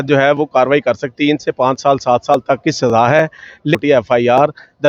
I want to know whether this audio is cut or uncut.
cut